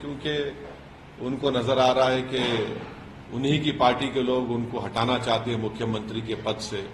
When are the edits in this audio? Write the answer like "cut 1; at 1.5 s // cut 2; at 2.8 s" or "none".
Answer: none